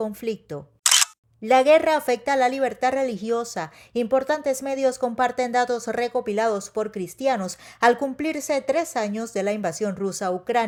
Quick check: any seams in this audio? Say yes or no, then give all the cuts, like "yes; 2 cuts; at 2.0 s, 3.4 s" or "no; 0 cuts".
no; 0 cuts